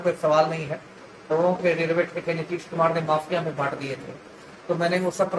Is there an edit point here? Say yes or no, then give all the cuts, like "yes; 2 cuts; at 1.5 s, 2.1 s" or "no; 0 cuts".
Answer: yes; 1 cut; at 1.2 s